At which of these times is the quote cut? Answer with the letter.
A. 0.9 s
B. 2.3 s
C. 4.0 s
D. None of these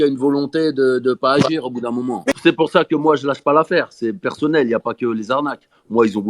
B